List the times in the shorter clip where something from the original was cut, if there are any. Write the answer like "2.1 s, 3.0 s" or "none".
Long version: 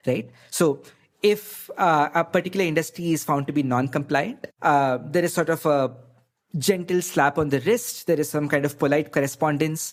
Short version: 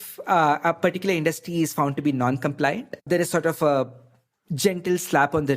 3.0 s